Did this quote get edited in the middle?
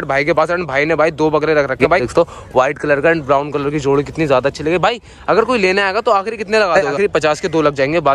yes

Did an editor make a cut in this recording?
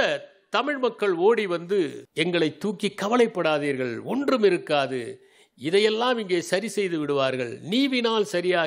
yes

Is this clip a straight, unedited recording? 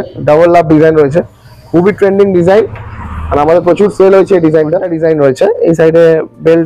no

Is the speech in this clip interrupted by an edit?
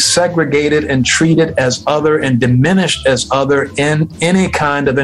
no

